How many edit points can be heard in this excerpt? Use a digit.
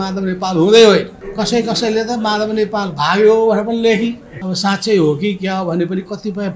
2